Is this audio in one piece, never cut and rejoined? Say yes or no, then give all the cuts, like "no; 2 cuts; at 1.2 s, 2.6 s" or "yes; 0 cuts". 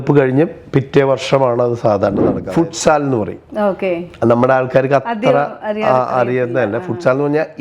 no; 1 cut; at 2.4 s